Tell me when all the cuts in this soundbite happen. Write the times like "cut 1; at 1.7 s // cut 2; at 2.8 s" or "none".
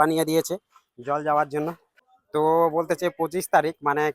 cut 1; at 1.9 s